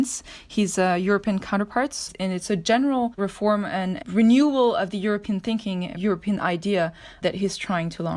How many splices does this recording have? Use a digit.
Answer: 3